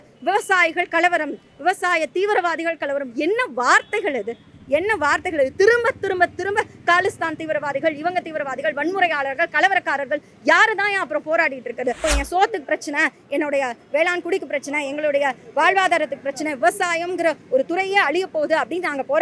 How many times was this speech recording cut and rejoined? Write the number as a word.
one